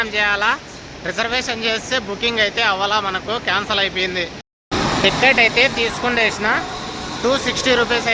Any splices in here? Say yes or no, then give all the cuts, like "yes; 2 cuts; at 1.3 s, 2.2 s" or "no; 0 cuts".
no; 0 cuts